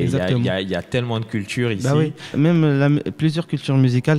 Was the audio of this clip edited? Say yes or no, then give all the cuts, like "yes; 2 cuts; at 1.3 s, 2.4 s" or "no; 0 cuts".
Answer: yes; 1 cut; at 2.3 s